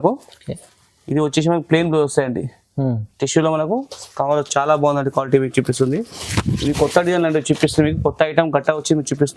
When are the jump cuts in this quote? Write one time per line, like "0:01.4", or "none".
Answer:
none